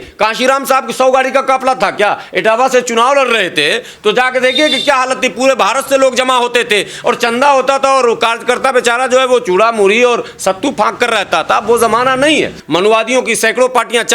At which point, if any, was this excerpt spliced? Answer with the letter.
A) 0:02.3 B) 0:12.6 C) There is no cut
B